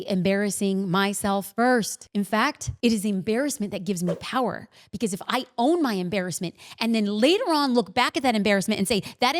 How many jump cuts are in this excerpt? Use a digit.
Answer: 2